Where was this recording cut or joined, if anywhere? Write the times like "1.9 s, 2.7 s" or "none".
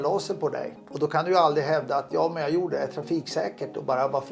none